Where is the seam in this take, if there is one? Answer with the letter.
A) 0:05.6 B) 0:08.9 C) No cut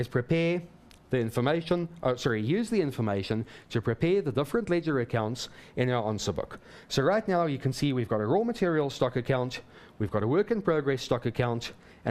B